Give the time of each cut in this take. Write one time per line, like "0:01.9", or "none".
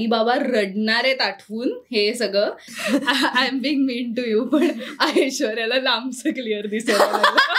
0:02.7